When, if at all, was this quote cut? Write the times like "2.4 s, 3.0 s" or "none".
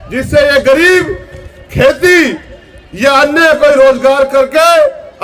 none